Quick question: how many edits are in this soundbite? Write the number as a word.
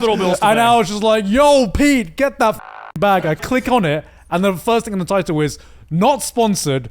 one